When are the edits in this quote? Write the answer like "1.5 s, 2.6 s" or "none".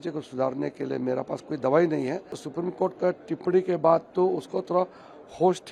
2.4 s